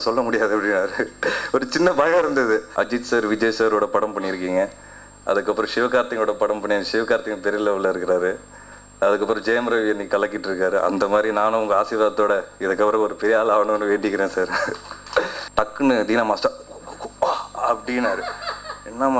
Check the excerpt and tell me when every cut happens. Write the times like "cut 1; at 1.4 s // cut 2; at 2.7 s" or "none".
cut 1; at 2.7 s // cut 2; at 15.4 s